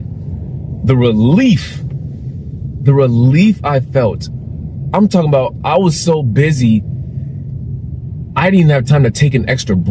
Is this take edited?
no; 0 cuts

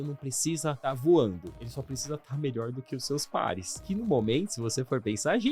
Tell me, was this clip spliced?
yes; 3 cuts; at 0.8 s, 1.6 s, 3.7 s

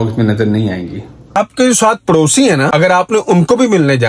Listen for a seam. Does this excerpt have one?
yes; 2 cuts; at 1.4 s, 2.7 s

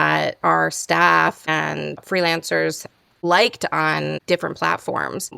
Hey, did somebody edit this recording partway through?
yes; 1 cut; at 3.1 s

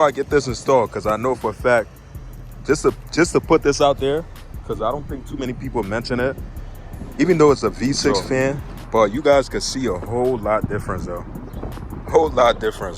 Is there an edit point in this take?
yes; 1 cut; at 8.7 s

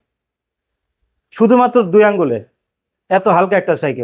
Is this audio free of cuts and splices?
yes; 0 cuts

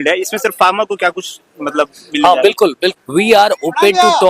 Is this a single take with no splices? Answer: no; 1 cut; at 2.9 s

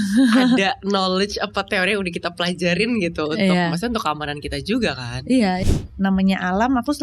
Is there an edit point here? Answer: yes; 1 cut; at 5.6 s

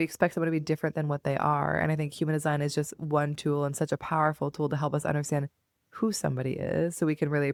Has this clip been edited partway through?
no; 0 cuts

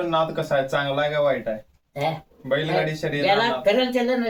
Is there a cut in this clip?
no; 0 cuts

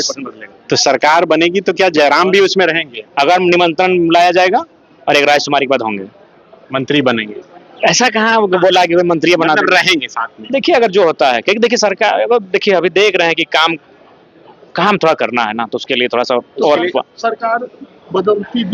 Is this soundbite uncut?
yes; 0 cuts

